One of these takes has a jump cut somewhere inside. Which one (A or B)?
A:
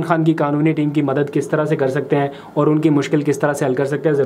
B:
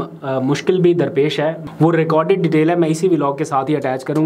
B